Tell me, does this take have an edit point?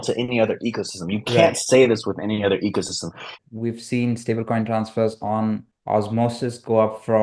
yes; 2 cuts; at 3.3 s, 5.7 s

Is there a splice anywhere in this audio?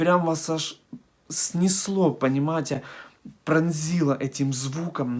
no; 0 cuts

